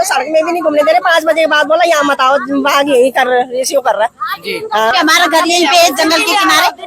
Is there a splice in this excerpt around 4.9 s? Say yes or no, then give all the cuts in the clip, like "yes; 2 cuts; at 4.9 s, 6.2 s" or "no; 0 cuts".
yes; 1 cut; at 4.9 s